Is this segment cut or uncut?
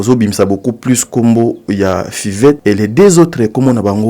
cut